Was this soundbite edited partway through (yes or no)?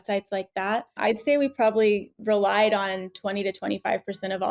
yes